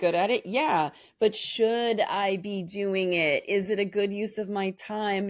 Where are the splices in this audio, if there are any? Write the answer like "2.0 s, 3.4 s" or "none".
none